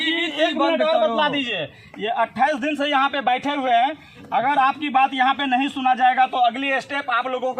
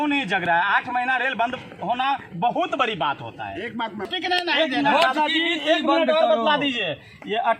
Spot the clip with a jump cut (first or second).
second